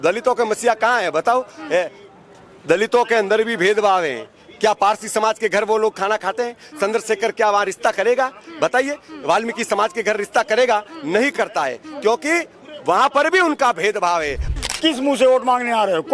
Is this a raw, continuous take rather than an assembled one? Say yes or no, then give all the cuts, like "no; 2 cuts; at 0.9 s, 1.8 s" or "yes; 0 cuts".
no; 1 cut; at 14.5 s